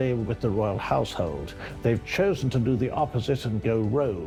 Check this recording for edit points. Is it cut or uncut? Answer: uncut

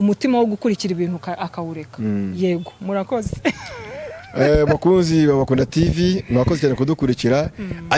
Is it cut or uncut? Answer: uncut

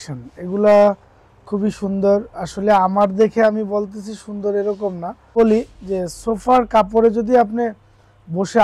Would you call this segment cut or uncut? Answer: cut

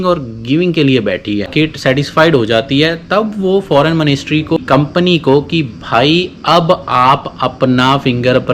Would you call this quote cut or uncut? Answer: cut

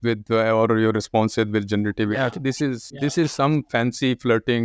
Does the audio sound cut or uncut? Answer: cut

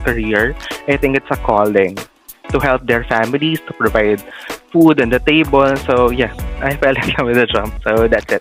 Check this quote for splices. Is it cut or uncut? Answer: uncut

